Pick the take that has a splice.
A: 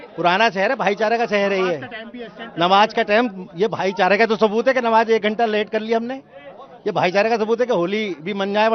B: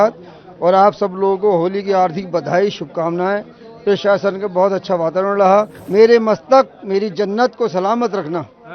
B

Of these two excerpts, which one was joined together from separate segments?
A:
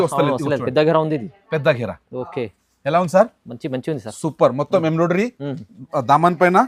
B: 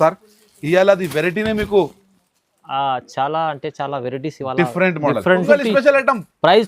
B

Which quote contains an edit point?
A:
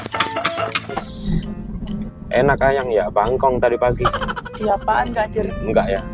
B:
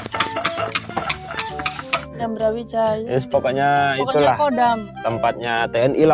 A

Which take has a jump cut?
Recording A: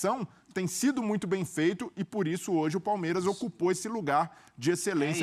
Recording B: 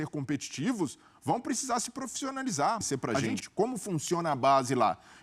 B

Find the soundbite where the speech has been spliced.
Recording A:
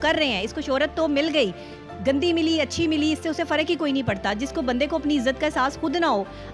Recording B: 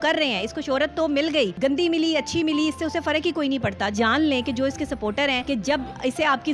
B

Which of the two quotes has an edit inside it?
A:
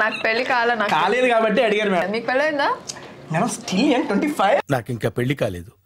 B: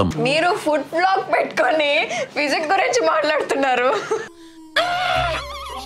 A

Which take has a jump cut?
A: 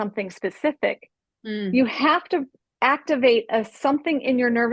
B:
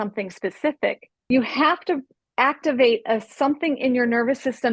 B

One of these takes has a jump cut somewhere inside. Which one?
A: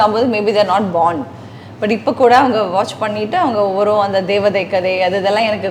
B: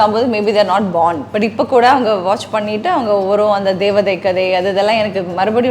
B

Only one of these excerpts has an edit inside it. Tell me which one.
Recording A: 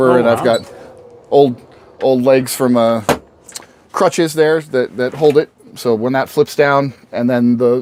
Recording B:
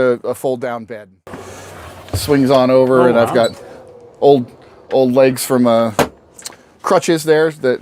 B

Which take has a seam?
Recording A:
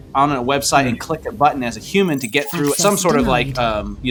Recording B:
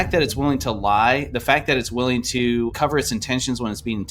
B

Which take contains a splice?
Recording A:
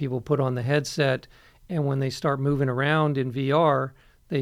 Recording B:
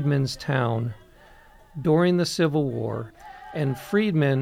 B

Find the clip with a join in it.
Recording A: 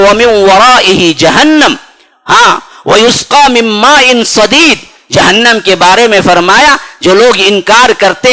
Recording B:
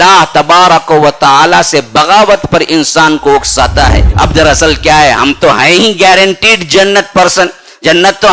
B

